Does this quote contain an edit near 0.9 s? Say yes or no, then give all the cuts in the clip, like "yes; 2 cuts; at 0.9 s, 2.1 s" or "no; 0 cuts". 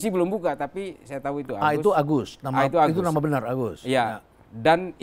no; 0 cuts